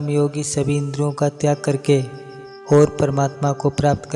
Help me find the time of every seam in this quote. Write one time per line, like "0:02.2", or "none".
none